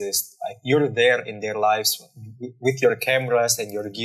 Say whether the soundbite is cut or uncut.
uncut